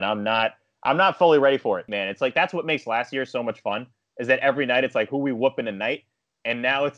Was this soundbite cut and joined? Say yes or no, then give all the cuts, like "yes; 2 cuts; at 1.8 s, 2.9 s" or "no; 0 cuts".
yes; 1 cut; at 1.9 s